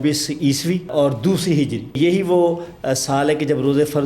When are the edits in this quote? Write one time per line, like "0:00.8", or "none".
0:00.9
0:02.0